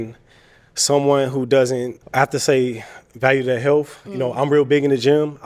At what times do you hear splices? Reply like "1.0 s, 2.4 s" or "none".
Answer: 2.0 s